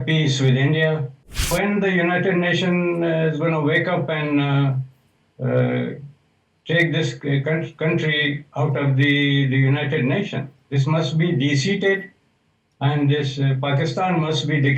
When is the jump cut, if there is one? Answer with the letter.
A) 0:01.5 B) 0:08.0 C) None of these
A